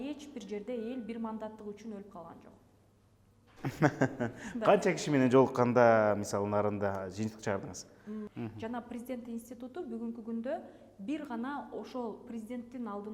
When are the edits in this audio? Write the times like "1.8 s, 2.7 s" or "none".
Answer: 8.3 s